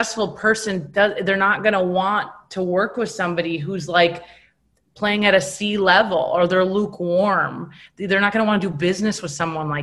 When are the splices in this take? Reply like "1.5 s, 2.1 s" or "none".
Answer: none